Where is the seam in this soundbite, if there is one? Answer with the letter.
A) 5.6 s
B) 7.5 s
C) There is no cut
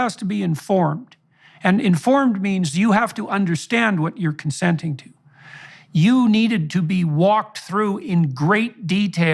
A